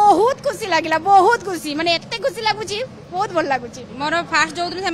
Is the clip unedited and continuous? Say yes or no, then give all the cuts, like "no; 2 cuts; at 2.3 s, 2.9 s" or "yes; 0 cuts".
no; 1 cut; at 3.9 s